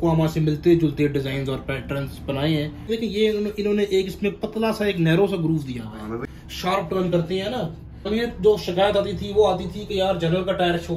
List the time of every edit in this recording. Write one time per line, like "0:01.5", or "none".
0:02.9
0:06.2
0:08.1